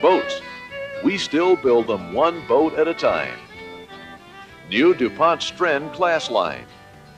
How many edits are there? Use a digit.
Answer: 0